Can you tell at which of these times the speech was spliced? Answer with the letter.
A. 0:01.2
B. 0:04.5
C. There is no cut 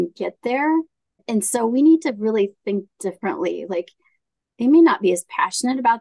A